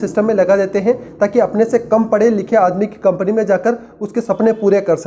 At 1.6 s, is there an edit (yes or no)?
no